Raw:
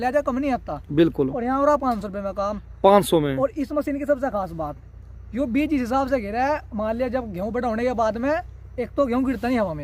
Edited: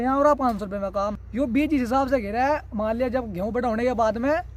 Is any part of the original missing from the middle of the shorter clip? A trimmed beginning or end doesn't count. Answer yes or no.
yes